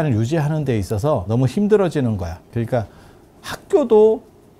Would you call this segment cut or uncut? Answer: cut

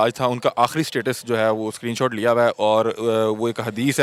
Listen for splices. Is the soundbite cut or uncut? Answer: uncut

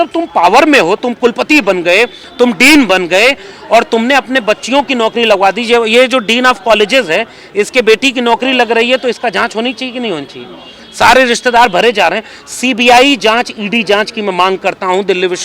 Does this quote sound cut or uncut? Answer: uncut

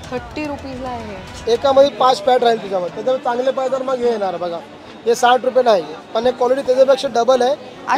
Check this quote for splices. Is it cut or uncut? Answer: uncut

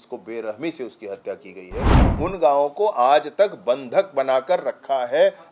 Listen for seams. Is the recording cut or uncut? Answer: cut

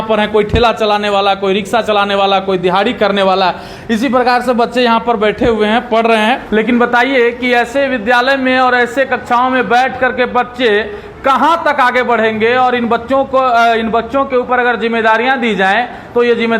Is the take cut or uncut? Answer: cut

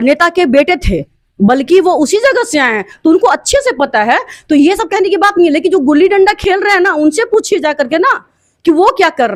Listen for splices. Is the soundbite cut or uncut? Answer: uncut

